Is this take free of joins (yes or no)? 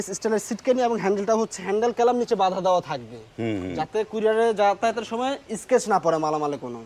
yes